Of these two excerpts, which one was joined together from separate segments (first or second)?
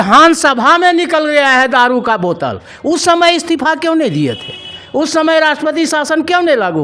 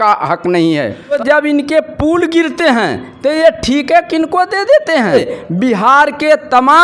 second